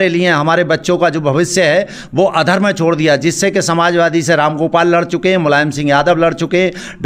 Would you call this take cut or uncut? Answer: uncut